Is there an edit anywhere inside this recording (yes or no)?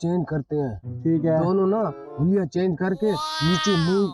no